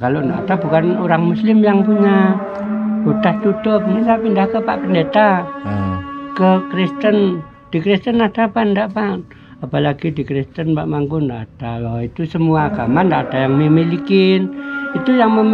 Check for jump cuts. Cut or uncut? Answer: uncut